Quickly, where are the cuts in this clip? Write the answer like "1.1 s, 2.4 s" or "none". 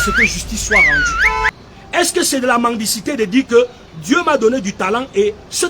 1.5 s